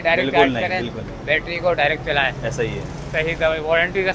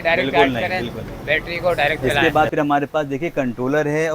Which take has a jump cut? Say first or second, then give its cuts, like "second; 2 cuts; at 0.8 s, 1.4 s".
second; 1 cut; at 2.1 s